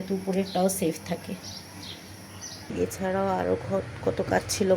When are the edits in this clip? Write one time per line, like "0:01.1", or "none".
0:02.7